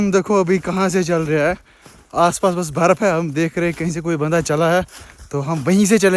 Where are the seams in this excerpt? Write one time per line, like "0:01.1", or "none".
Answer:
none